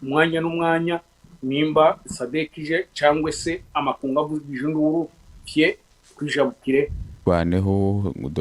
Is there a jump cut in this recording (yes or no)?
yes